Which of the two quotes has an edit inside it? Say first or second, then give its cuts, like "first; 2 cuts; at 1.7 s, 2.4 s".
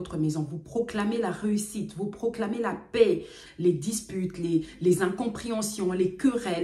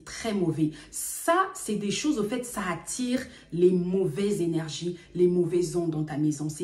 first; 1 cut; at 3.4 s